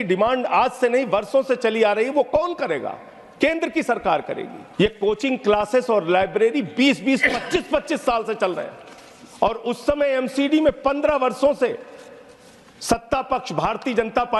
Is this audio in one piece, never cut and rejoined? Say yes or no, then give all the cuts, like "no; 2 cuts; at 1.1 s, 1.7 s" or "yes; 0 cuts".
no; 1 cut; at 4.5 s